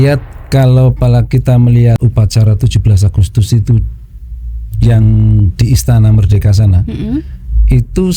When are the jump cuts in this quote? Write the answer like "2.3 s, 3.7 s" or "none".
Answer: 2.0 s